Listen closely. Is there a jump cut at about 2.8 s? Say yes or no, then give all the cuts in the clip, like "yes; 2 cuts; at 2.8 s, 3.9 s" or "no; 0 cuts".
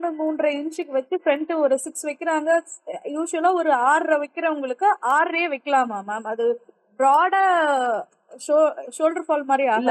no; 0 cuts